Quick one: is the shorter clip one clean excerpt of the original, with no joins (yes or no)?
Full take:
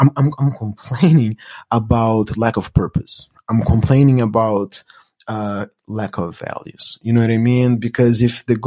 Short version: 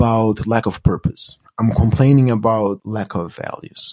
no